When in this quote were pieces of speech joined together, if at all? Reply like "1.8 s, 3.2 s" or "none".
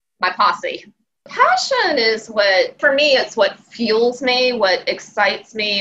1.3 s, 2.8 s